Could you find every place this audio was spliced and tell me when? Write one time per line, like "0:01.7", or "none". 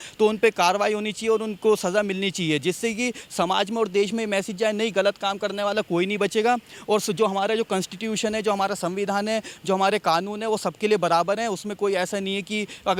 none

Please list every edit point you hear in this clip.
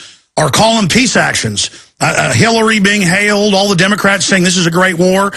0:02.2

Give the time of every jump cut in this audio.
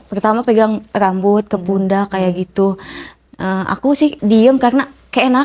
0:04.2

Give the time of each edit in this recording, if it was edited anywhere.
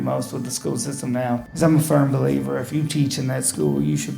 0:01.5

